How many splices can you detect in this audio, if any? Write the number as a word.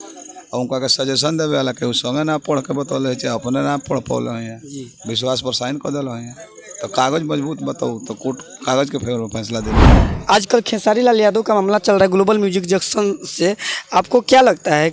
one